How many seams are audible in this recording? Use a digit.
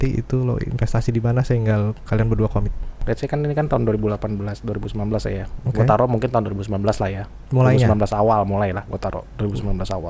1